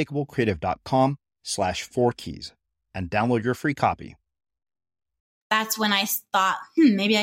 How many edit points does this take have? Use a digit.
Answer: 1